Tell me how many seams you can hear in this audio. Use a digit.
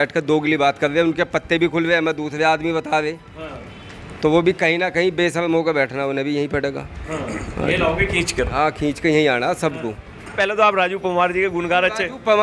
1